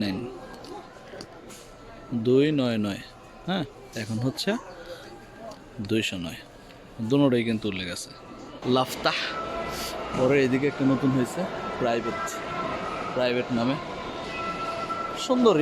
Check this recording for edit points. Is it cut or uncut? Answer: cut